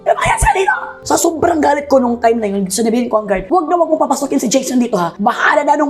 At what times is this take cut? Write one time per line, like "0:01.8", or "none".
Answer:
0:00.9